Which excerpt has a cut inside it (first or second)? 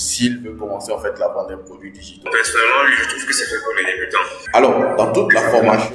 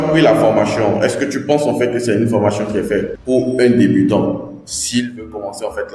first